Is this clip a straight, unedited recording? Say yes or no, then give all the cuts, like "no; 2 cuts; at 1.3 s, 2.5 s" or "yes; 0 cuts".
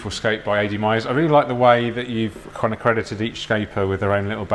yes; 0 cuts